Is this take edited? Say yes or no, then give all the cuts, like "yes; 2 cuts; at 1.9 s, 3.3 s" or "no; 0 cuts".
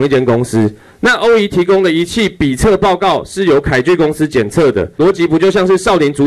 yes; 1 cut; at 4.9 s